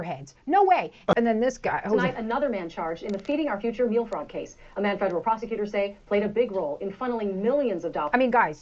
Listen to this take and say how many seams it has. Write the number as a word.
one